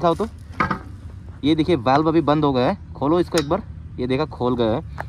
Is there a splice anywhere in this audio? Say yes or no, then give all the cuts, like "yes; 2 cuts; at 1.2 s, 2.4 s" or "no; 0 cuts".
no; 0 cuts